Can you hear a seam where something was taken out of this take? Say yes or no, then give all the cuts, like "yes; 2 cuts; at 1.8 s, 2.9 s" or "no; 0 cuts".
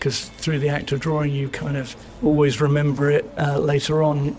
yes; 2 cuts; at 2.0 s, 3.3 s